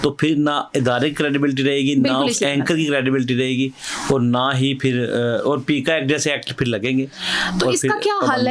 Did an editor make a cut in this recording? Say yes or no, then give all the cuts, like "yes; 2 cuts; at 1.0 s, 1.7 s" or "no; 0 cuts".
no; 0 cuts